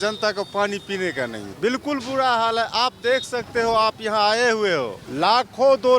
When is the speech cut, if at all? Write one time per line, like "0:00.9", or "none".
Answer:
0:01.4
0:05.0

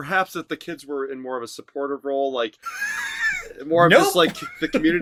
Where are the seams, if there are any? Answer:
none

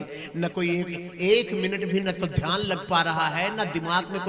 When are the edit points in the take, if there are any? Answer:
none

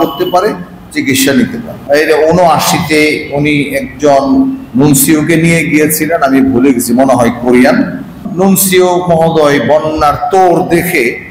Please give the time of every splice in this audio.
0:01.7
0:08.2

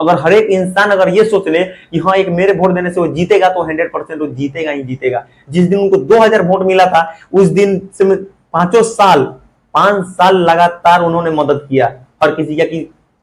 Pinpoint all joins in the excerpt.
none

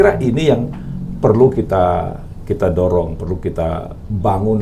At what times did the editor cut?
none

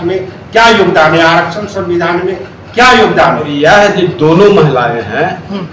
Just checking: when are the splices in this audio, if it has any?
0:03.5

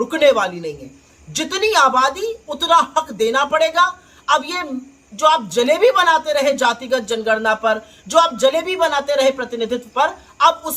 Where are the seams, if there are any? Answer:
none

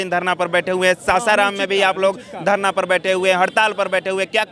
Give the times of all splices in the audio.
none

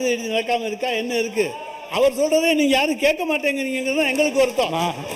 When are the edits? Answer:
none

